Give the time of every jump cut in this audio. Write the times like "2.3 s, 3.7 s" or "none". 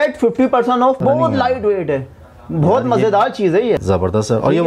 1.0 s, 3.8 s